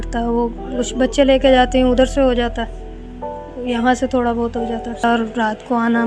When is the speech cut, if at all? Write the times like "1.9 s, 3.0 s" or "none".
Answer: 5.0 s